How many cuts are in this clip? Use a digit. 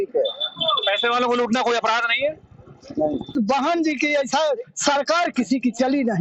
1